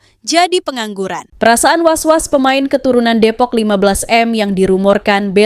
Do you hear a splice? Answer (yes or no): yes